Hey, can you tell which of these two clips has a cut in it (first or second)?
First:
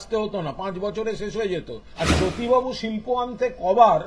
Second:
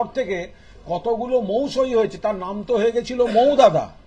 first